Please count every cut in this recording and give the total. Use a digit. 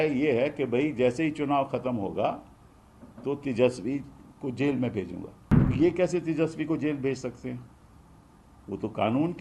1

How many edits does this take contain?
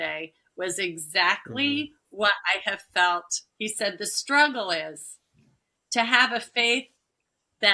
1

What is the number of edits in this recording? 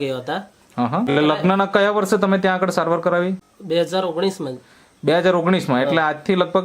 2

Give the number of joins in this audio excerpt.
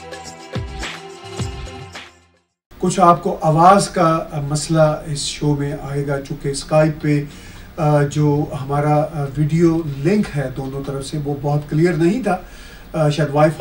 1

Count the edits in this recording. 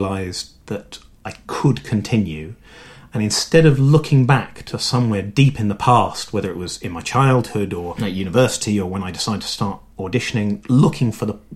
0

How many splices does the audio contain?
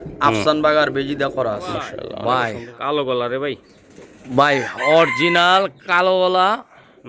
1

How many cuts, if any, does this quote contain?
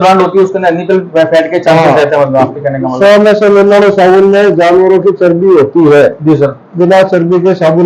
2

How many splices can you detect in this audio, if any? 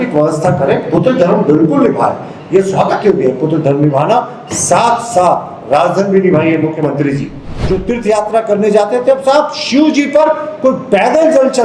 1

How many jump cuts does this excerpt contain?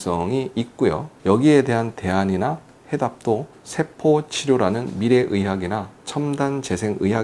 1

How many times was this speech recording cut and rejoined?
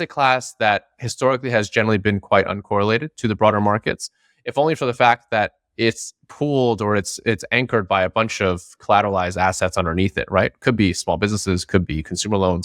0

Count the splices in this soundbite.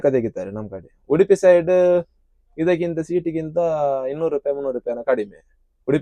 0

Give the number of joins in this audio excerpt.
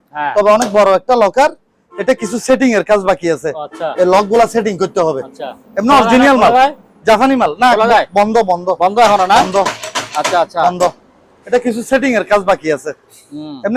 0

